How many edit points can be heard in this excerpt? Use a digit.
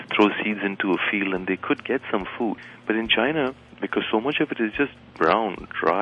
1